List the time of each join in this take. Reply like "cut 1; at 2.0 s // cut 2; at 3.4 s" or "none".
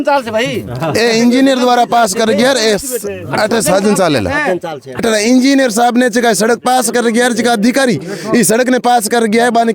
cut 1; at 5.0 s